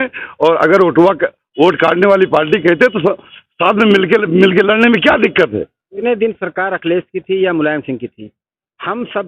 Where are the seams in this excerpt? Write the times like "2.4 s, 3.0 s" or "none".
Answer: 6.0 s